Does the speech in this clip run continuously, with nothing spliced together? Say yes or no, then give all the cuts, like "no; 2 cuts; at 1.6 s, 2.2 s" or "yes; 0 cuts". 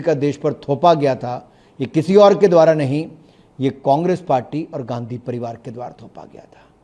yes; 0 cuts